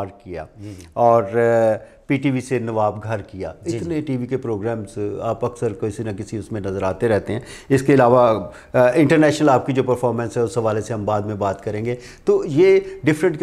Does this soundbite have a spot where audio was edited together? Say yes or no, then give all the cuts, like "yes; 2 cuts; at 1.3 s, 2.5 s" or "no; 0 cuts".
no; 0 cuts